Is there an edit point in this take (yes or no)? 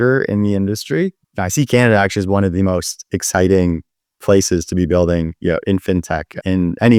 no